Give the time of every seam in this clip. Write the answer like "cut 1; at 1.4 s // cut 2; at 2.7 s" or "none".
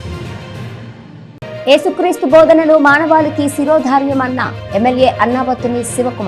cut 1; at 1.0 s